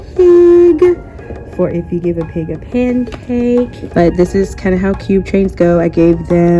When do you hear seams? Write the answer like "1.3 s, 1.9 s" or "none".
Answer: 3.8 s